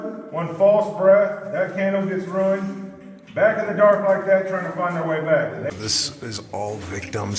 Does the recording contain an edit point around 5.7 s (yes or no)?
yes